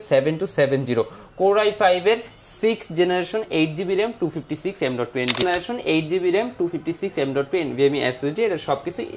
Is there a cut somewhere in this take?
yes; 1 cut; at 5.4 s

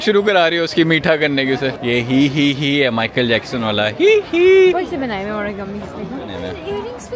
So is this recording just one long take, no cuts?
yes; 0 cuts

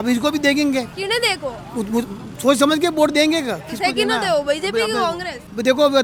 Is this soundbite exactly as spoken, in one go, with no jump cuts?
yes; 0 cuts

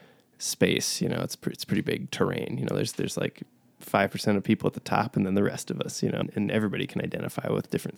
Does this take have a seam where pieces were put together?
yes; 1 cut; at 6.2 s

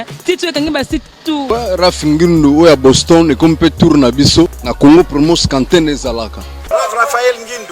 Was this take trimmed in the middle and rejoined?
yes; 3 cuts; at 1.4 s, 4.6 s, 6.6 s

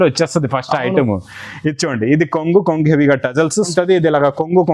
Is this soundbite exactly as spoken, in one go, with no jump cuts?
no; 1 cut; at 3.7 s

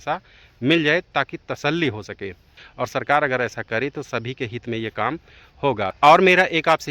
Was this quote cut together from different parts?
yes; 2 cuts; at 2.6 s, 5.9 s

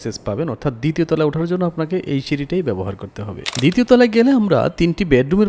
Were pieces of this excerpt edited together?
yes; 1 cut; at 3.4 s

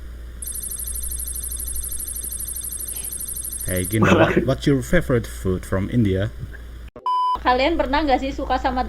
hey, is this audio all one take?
no; 1 cut; at 7.3 s

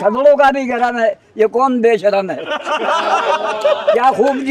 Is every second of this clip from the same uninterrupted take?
yes; 0 cuts

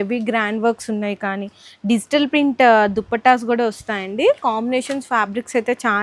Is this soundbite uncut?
yes; 0 cuts

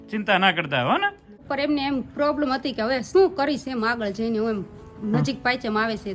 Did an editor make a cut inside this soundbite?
yes; 1 cut; at 1.3 s

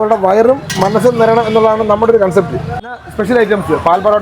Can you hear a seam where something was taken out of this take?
yes; 1 cut; at 3.0 s

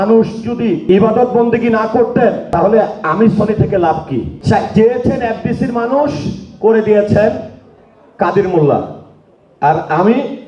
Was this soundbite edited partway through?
yes; 3 cuts; at 0.8 s, 2.4 s, 4.3 s

